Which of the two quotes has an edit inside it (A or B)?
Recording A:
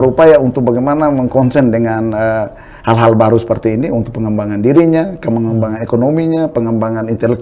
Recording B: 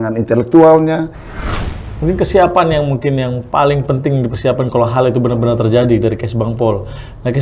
B